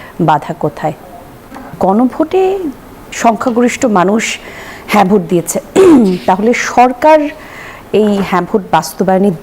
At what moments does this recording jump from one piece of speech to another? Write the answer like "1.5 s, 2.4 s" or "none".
1.6 s